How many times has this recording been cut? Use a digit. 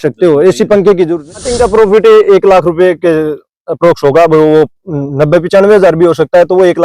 1